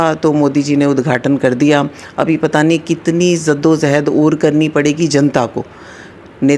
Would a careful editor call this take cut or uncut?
uncut